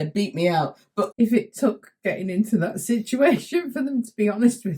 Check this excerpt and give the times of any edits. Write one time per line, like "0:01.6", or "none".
0:01.1